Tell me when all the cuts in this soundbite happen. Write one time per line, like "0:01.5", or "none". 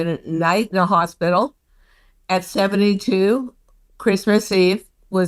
none